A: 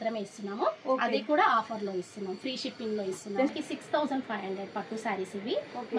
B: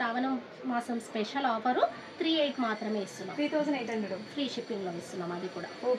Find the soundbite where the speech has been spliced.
A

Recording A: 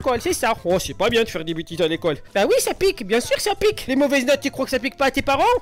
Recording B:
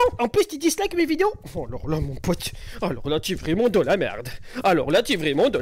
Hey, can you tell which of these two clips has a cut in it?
A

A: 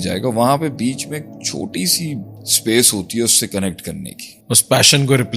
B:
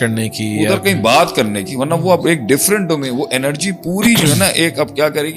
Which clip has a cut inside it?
A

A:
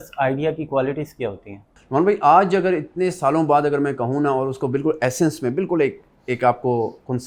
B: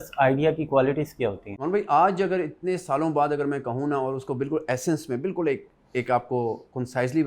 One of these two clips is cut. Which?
B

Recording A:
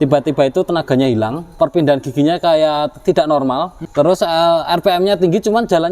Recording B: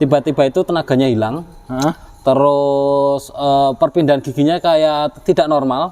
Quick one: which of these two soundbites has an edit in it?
A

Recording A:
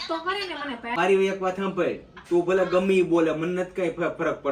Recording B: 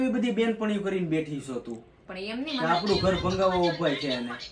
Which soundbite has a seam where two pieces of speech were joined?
A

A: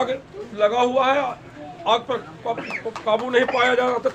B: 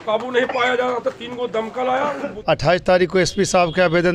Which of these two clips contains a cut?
B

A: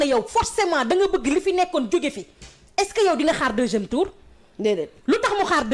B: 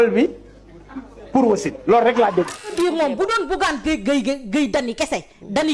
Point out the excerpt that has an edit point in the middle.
B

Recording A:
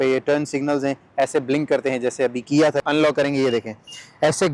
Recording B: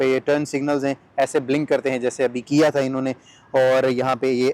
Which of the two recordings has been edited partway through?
A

